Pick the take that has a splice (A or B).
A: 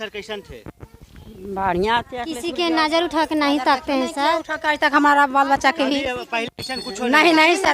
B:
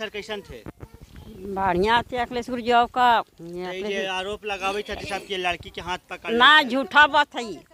A